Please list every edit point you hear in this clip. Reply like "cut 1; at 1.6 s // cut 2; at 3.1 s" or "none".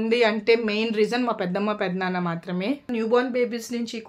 cut 1; at 2.9 s